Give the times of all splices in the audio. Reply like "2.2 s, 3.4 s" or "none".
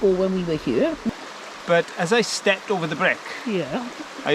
1.0 s